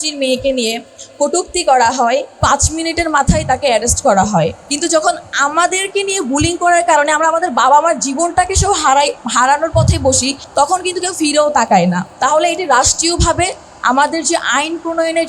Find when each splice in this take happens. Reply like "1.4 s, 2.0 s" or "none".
2.3 s, 4.6 s, 10.4 s, 12.1 s